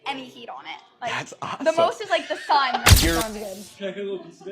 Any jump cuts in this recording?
yes; 1 cut; at 3.2 s

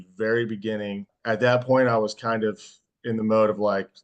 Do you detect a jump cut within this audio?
yes; 1 cut; at 1.1 s

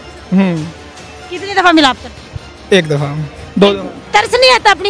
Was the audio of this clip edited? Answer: yes; 1 cut; at 4.0 s

